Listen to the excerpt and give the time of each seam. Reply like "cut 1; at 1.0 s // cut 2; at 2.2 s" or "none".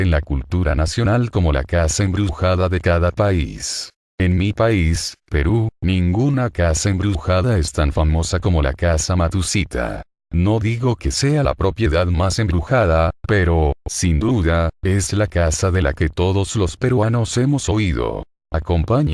cut 1; at 8.8 s // cut 2; at 10.1 s